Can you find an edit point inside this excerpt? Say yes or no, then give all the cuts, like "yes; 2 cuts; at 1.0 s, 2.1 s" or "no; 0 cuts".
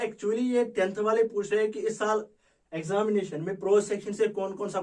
no; 0 cuts